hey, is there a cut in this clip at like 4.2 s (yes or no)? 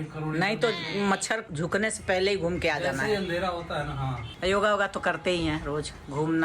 yes